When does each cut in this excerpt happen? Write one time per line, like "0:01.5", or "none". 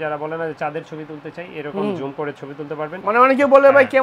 0:02.9